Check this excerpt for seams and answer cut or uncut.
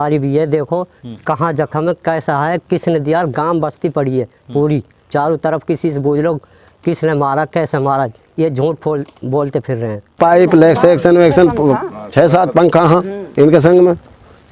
cut